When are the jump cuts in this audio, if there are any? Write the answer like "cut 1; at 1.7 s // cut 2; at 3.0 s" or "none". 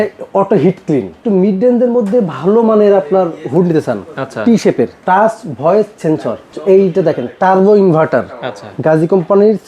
cut 1; at 1.2 s // cut 2; at 5.0 s // cut 3; at 6.5 s

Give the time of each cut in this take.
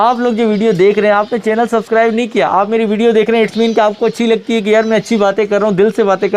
none

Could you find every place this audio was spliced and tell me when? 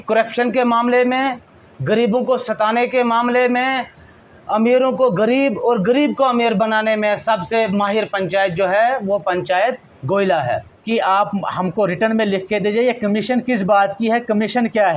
cut 1; at 10.7 s

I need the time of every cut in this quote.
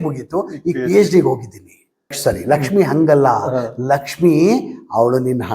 cut 1; at 2.2 s

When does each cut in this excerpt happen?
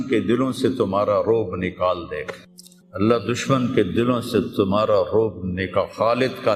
none

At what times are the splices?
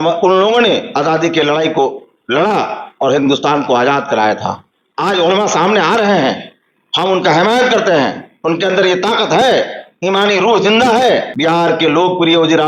cut 1; at 11.3 s

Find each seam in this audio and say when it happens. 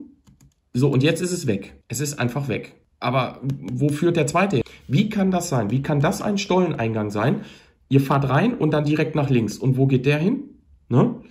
cut 1; at 1.8 s // cut 2; at 2.8 s // cut 3; at 4.6 s

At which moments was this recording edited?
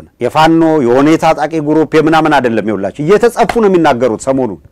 none

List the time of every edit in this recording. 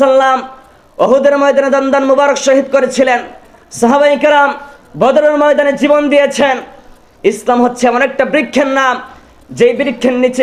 none

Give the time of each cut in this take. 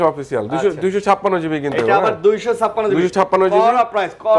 none

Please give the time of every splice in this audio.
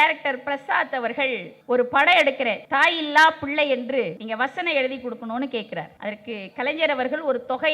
cut 1; at 1.5 s // cut 2; at 2.6 s // cut 3; at 4.2 s // cut 4; at 5.9 s

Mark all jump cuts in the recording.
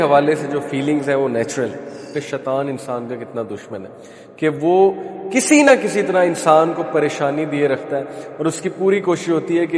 cut 1; at 2.3 s

